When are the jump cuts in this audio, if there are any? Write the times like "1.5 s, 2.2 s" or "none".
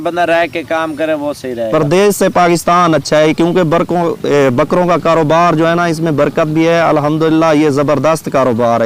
none